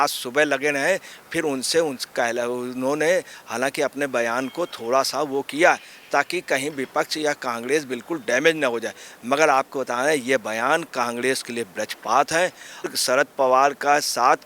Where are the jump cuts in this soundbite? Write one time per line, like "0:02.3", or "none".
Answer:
0:12.9